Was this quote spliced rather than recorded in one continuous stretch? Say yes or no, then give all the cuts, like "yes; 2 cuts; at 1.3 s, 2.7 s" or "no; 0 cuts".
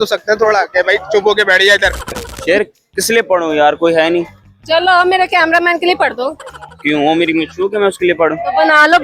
yes; 1 cut; at 2.3 s